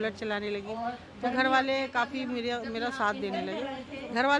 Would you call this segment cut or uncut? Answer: uncut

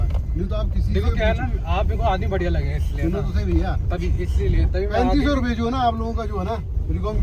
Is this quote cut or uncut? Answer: uncut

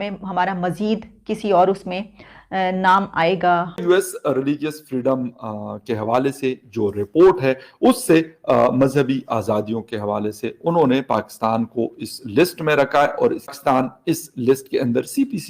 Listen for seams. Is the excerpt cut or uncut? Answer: cut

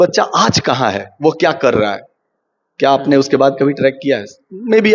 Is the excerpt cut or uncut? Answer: uncut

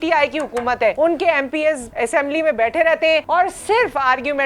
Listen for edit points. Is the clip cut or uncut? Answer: cut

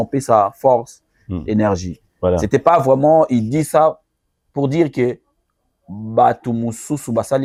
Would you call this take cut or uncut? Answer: uncut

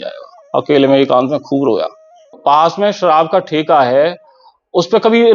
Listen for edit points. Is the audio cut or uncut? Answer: cut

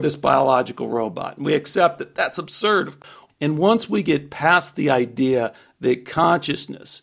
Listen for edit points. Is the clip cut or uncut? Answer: cut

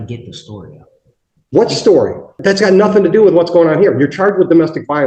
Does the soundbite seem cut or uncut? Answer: cut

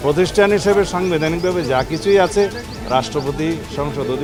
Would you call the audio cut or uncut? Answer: uncut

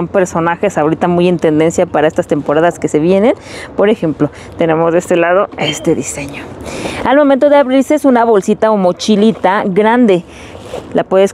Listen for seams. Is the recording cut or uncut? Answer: uncut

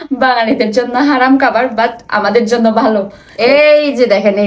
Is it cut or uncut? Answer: cut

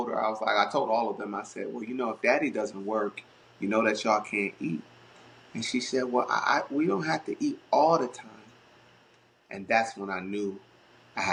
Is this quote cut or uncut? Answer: uncut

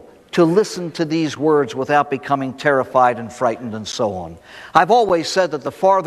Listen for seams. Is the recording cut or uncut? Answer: cut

